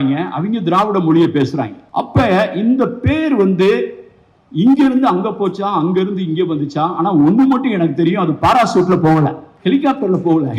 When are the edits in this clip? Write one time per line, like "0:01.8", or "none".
0:01.8
0:09.5